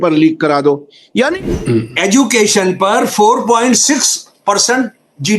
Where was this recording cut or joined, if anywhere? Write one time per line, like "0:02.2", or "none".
0:01.4